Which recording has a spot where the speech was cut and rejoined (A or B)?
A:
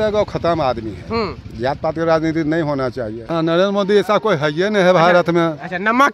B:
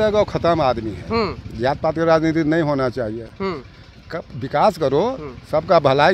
A